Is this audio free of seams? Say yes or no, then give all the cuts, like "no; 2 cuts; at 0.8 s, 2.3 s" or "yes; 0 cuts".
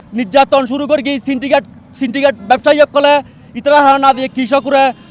yes; 0 cuts